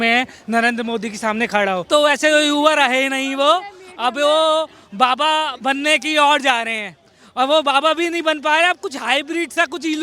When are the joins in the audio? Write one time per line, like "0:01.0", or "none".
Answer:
0:01.8

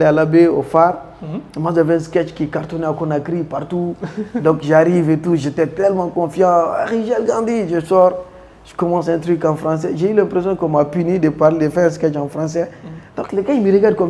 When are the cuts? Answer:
none

